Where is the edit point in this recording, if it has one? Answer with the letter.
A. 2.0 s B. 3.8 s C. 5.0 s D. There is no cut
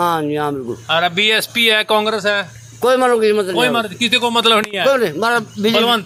D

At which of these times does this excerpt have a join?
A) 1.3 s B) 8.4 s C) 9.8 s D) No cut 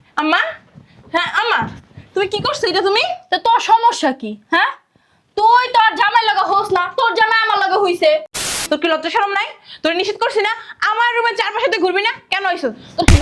B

